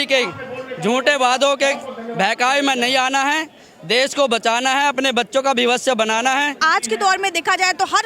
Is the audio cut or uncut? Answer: cut